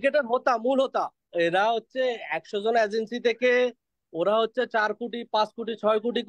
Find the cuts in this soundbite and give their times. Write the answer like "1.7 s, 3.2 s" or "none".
1.2 s

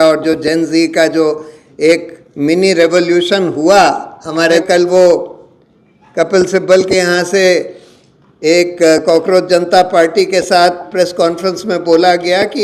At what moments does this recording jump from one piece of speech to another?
4.6 s

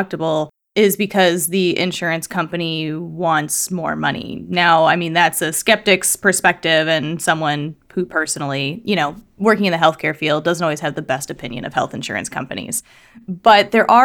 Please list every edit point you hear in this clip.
none

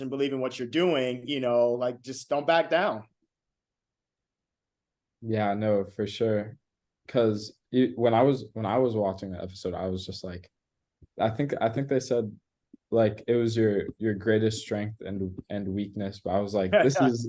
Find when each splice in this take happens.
none

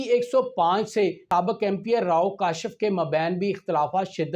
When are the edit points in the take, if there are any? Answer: 1.2 s

